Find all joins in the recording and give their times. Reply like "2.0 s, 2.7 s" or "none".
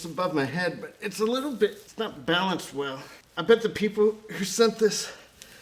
1.8 s

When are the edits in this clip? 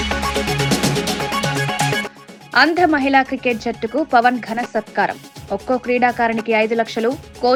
none

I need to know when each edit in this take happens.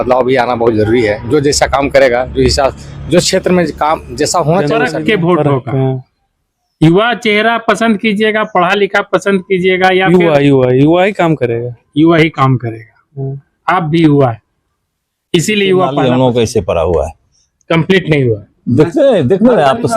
4.7 s, 15.9 s

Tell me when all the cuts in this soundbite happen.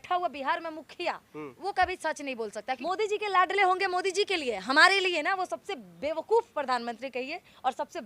2.8 s

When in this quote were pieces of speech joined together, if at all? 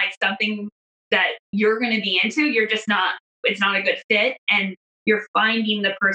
1.4 s, 4.9 s

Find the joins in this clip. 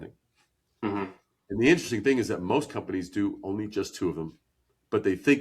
none

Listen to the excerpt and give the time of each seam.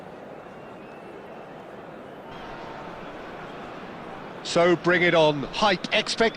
4.5 s

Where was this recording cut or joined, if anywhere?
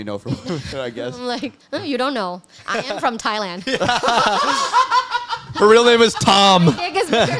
none

